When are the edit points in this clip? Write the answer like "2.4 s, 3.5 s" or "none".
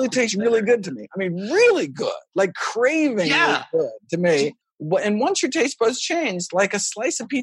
4.7 s